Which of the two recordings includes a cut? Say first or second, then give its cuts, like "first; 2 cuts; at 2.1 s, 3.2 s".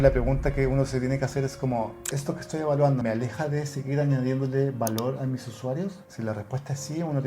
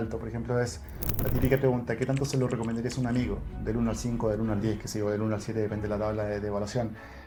first; 2 cuts; at 3.0 s, 6.1 s